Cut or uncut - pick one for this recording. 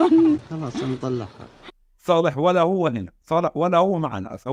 uncut